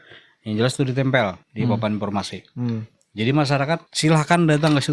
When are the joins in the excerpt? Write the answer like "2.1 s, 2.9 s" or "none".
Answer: 1.4 s, 3.9 s